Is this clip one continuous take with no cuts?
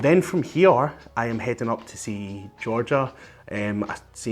yes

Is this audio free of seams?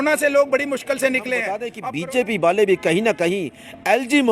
no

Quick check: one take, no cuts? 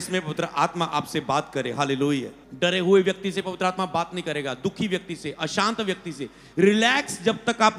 no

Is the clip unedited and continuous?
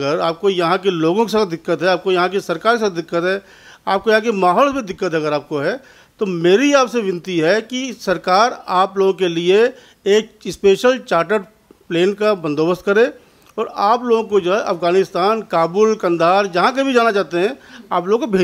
yes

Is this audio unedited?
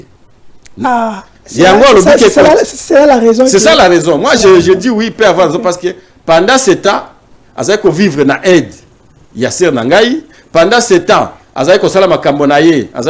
yes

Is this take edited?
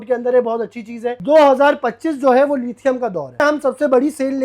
yes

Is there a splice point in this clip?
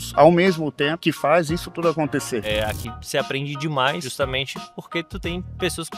yes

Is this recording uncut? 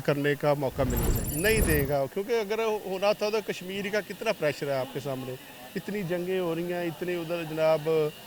no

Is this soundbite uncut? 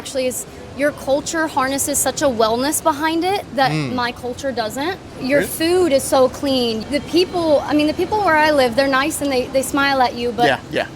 no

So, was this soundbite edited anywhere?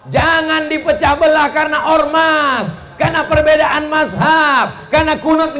no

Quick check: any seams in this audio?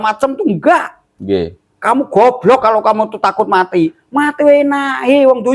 no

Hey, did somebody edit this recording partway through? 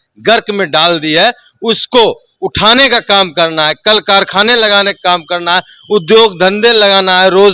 no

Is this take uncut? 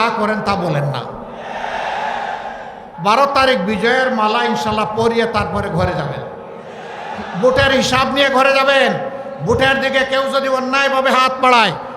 no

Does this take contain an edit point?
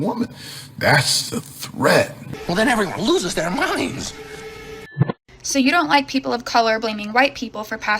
yes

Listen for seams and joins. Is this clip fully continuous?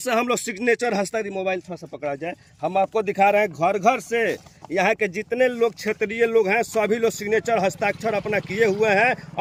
yes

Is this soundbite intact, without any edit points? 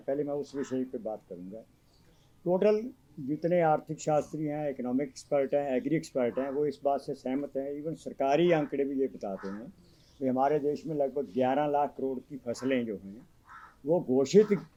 yes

